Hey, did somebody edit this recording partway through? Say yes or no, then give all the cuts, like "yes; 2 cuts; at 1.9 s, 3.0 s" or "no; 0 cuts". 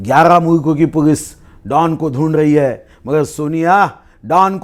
no; 0 cuts